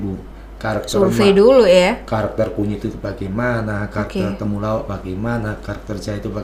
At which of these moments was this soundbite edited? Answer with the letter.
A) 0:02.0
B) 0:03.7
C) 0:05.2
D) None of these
D